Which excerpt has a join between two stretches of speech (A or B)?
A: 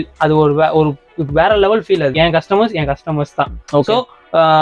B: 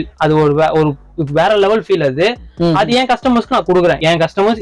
A